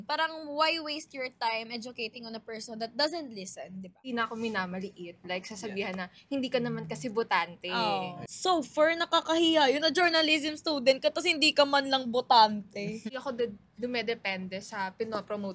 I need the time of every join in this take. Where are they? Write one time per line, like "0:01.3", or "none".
0:04.1
0:08.2
0:13.1